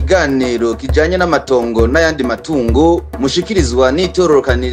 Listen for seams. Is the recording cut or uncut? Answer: uncut